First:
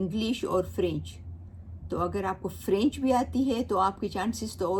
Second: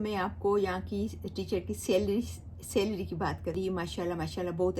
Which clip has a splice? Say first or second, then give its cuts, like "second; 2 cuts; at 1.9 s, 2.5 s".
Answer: second; 1 cut; at 3.5 s